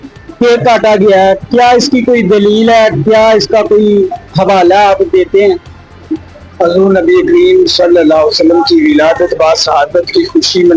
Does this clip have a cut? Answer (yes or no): no